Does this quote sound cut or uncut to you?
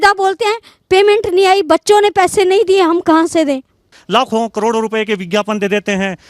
cut